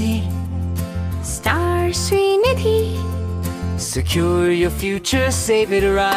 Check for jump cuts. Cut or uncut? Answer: uncut